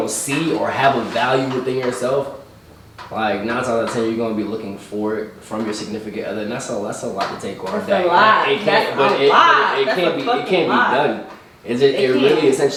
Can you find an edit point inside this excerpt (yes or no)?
no